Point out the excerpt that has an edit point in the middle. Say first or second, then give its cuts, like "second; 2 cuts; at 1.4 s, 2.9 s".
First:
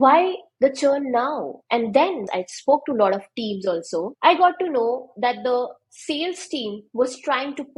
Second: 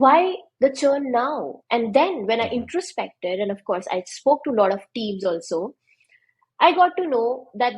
first; 2 cuts; at 2.2 s, 4.1 s